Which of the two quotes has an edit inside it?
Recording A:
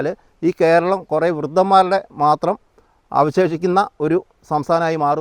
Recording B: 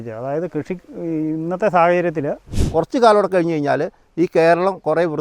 B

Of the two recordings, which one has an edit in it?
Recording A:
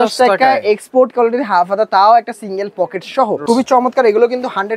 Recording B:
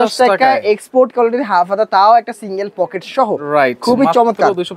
A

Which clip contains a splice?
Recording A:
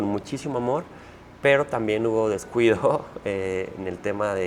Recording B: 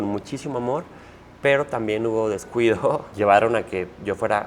B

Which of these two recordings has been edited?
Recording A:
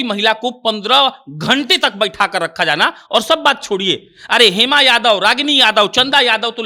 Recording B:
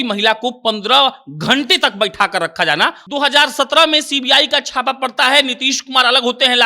B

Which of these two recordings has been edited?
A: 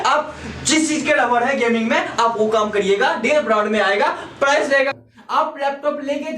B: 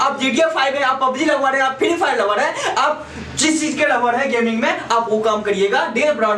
A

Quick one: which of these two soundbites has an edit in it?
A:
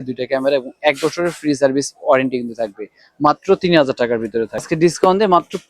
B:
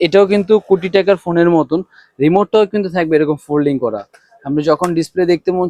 A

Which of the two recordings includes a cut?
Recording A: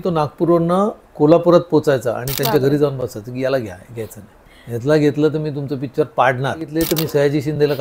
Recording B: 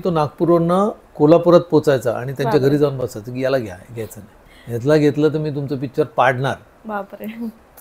A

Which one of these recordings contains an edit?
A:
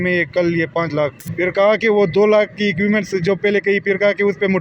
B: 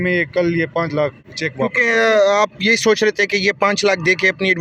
A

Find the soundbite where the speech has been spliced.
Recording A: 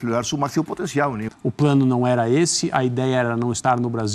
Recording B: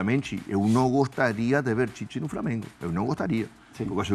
A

